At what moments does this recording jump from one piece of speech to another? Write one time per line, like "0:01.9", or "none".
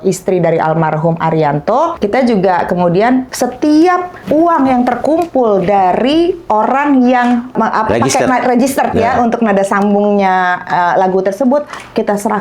0:02.0
0:03.3
0:04.2
0:07.5